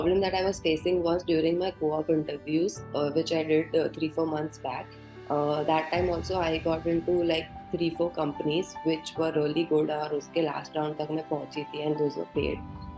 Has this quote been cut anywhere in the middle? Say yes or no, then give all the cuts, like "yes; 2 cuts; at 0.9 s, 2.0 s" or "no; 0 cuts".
no; 0 cuts